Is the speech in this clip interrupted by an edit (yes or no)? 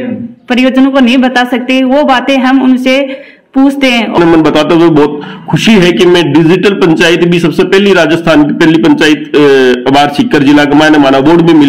yes